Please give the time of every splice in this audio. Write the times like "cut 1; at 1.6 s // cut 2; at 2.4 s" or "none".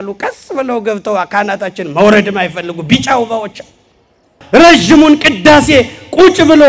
cut 1; at 4.3 s